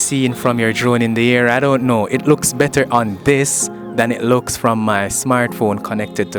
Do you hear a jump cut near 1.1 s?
no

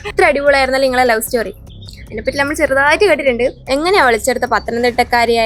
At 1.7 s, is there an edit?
no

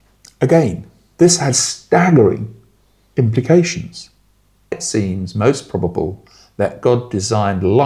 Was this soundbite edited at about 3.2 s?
no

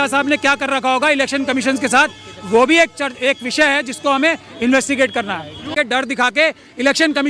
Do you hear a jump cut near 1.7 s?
no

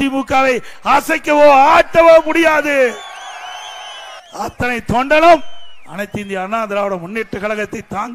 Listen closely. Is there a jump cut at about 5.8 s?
no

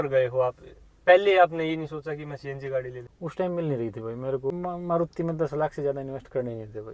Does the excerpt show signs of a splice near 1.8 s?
no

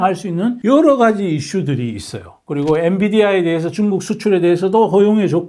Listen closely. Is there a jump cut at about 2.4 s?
no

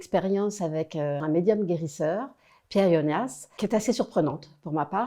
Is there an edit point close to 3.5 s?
yes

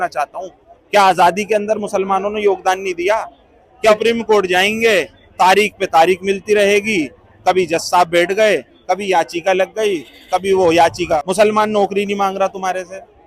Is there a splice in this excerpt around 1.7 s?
no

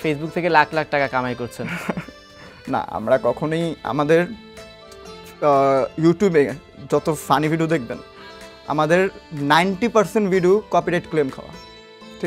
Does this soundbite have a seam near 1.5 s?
no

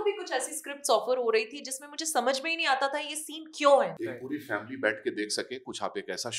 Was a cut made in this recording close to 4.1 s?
yes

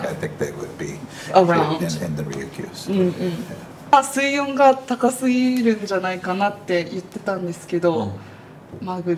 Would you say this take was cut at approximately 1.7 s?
no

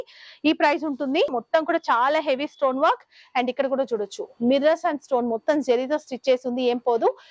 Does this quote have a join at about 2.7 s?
no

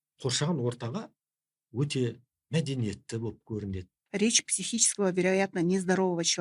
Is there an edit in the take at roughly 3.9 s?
yes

